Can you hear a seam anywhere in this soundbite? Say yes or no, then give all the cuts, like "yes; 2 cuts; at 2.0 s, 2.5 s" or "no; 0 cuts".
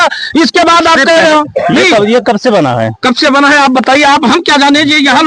no; 0 cuts